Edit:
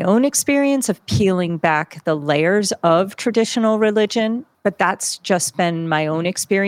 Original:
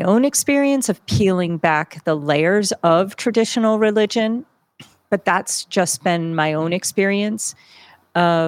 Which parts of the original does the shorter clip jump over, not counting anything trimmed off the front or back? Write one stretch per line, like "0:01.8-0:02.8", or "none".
0:04.5-0:05.0